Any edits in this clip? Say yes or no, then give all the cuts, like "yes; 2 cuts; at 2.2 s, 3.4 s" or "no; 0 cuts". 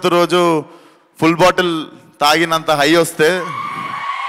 no; 0 cuts